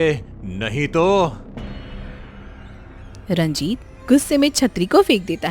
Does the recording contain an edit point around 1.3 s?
yes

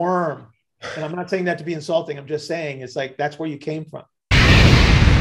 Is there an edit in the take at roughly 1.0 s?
no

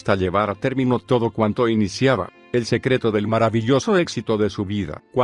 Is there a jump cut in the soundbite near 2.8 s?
no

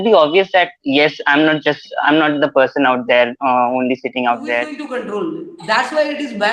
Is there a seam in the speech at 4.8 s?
yes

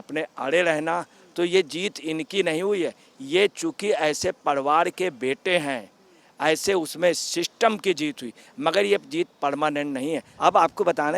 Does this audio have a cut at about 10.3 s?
yes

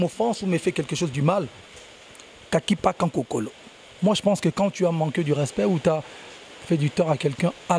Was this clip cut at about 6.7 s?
no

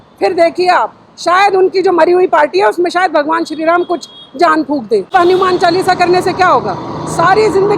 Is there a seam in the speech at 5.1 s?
yes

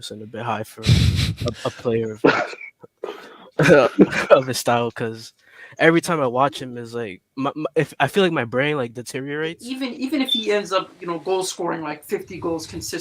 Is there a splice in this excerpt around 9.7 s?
yes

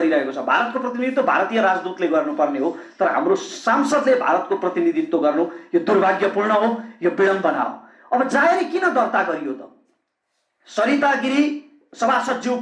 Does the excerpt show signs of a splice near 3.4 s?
no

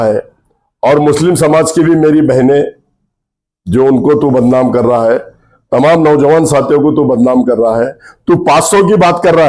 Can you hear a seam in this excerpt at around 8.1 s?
yes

